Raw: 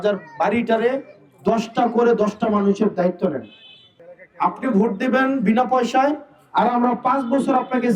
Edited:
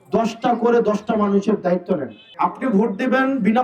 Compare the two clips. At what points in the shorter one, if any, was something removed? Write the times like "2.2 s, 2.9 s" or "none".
2.2 s